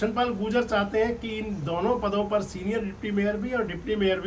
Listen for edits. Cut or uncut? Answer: uncut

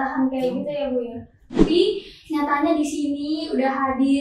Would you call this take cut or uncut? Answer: cut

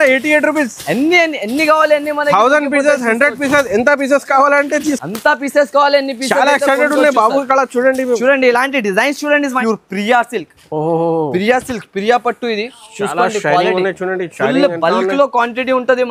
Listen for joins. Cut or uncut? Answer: cut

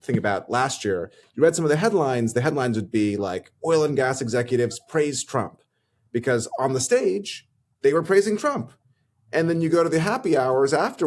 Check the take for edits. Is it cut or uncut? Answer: uncut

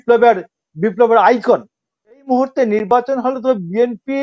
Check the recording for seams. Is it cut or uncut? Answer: cut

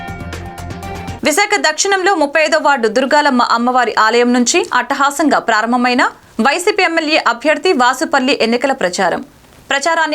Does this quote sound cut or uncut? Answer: cut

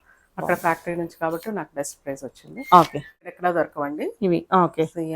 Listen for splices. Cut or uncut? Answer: cut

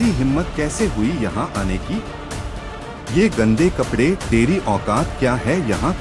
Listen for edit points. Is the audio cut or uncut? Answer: uncut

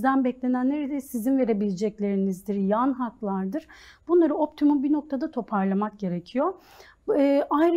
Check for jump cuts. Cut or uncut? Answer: uncut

